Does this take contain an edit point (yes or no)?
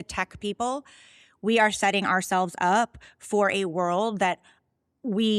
no